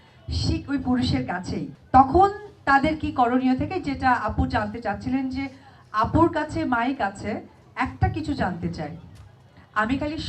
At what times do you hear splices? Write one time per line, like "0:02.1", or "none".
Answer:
none